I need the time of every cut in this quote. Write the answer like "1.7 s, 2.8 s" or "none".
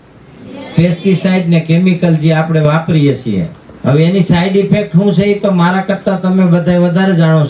3.6 s

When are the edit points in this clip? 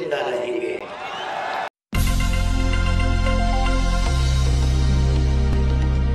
1.7 s

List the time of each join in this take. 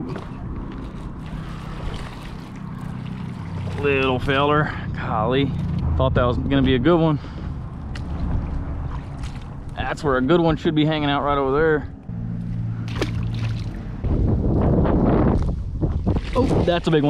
5.8 s, 12.1 s, 14.0 s

